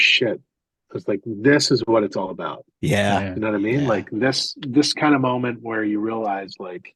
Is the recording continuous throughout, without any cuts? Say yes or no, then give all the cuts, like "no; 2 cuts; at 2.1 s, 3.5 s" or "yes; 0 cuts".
yes; 0 cuts